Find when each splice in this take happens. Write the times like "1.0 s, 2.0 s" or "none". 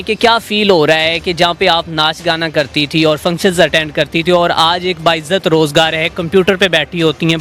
none